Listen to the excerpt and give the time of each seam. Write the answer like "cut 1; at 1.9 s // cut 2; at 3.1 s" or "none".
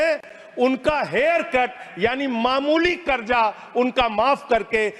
none